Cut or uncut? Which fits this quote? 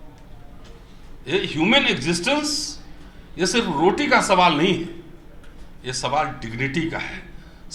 uncut